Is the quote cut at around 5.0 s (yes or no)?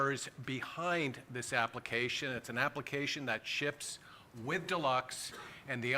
yes